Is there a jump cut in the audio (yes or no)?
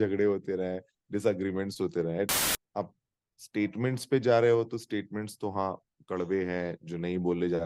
yes